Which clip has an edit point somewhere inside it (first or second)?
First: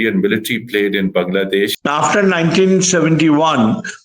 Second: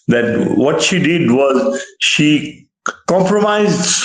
first